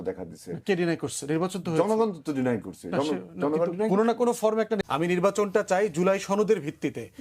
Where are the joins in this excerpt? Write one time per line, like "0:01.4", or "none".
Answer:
0:04.8